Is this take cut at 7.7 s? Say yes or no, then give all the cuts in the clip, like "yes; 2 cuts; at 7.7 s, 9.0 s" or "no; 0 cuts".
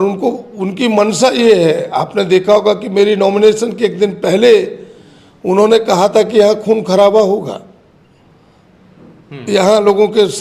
no; 0 cuts